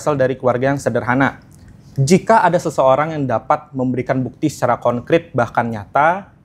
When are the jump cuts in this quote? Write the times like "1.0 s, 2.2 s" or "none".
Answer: none